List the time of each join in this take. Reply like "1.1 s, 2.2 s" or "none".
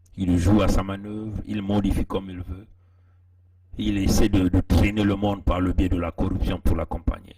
none